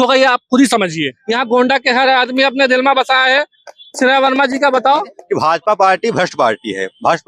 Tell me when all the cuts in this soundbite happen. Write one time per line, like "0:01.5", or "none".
0:01.1
0:05.2